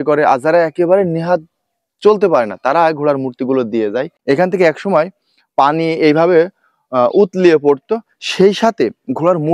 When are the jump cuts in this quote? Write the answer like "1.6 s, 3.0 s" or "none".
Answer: 4.1 s